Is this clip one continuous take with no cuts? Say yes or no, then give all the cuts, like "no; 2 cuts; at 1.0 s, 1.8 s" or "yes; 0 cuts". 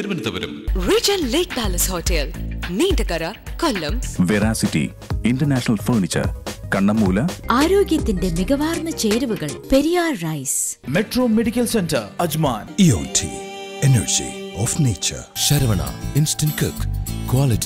no; 1 cut; at 10.7 s